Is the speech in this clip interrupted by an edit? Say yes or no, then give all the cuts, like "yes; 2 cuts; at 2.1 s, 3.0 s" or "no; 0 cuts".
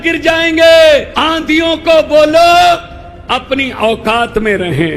yes; 1 cut; at 1.2 s